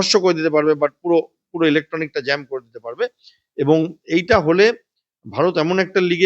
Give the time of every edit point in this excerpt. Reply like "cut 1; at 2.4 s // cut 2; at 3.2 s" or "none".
none